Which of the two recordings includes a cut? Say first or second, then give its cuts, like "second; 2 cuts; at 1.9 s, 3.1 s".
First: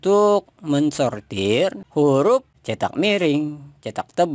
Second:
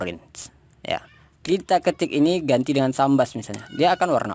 first; 2 cuts; at 1.8 s, 2.6 s